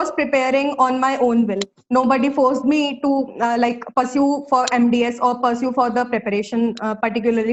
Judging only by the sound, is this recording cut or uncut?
uncut